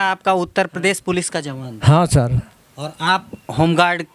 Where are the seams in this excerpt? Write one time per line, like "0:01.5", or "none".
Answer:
none